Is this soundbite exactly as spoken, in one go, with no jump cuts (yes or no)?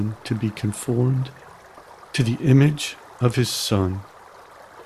yes